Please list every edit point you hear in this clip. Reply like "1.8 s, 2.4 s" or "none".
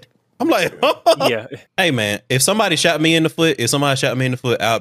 1.7 s